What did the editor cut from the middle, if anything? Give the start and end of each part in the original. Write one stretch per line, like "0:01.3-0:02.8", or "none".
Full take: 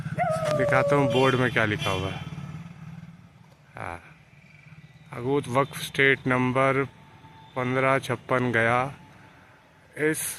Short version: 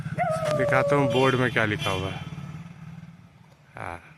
none

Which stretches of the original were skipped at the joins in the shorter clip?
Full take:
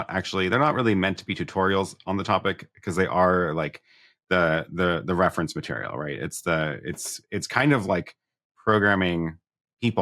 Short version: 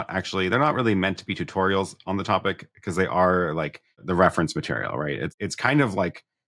0:04.0-0:05.0
0:06.3-0:07.2

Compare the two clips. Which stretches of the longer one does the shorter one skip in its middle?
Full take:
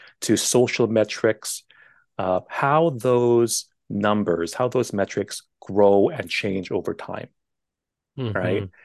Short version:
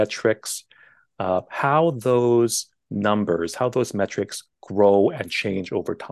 none

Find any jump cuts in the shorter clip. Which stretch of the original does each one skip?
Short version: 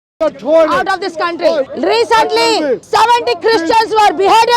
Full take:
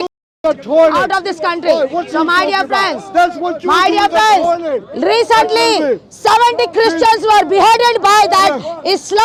0:01.9-0:04.9
0:06.0-0:06.1

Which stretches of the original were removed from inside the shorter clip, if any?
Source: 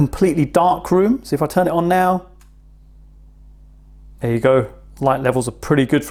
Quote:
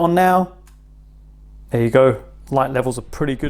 0:03.2-0:03.9

